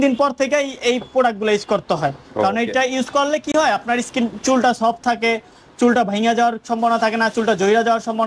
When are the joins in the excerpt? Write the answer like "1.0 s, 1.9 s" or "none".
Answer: none